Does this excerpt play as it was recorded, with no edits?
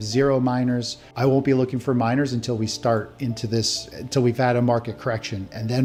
yes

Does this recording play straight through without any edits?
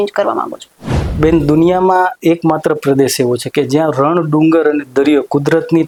yes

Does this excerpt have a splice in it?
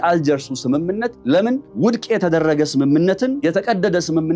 yes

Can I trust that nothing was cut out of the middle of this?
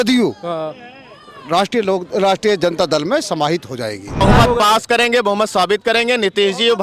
no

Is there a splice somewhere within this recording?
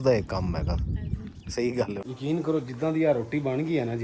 yes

